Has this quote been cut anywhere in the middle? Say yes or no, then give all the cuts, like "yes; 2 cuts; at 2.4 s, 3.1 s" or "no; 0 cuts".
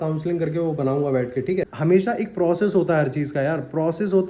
yes; 1 cut; at 1.7 s